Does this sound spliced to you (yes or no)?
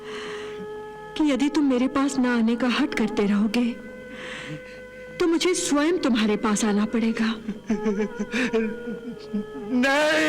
yes